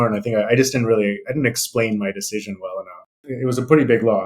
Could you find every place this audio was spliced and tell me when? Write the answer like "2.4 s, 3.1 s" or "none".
3.2 s